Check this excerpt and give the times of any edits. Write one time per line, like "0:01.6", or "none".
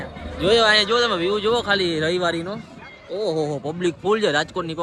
none